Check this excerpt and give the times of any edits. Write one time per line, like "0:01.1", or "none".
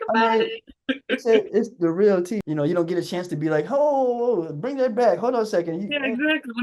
0:02.4